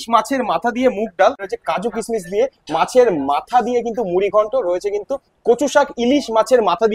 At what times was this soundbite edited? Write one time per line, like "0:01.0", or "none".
0:01.5